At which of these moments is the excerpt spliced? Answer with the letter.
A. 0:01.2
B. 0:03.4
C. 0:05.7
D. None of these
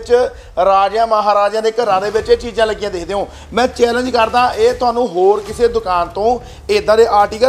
D